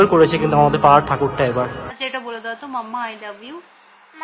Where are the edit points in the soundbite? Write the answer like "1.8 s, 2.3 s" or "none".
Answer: 1.9 s